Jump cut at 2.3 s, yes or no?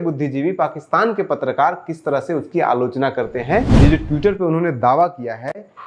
no